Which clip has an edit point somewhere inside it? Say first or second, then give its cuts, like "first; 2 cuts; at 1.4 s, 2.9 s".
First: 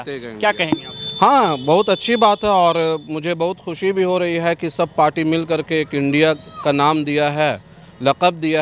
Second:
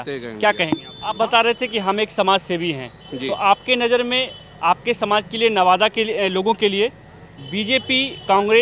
second; 1 cut; at 0.9 s